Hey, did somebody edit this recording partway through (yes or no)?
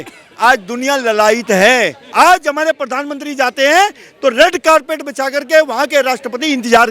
yes